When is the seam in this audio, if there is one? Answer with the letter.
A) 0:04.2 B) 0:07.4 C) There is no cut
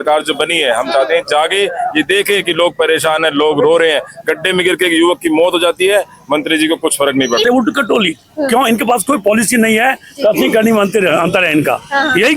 B